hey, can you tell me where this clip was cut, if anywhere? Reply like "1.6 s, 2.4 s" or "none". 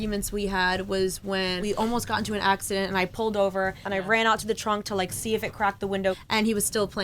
1.6 s, 3.9 s, 6.2 s